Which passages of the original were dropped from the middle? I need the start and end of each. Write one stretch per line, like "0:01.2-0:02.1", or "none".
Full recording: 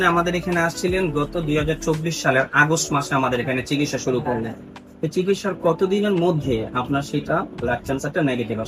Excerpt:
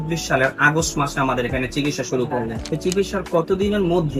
0:04.5-0:04.9